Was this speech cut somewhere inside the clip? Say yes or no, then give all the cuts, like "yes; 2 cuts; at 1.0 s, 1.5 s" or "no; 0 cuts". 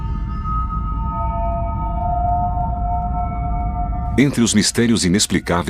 yes; 1 cut; at 2.9 s